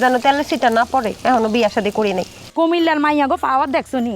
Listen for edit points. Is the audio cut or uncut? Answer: cut